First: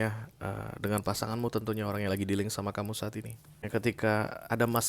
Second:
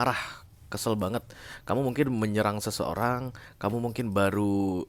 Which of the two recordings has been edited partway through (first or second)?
first